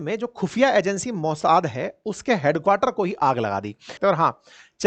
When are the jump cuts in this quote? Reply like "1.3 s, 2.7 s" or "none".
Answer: 3.8 s